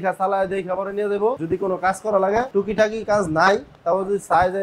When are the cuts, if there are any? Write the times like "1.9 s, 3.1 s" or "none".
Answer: 1.4 s, 2.5 s